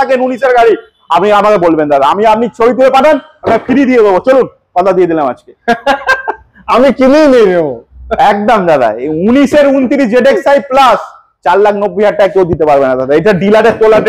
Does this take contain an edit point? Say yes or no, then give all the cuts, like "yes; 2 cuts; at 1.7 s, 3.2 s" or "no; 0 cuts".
no; 0 cuts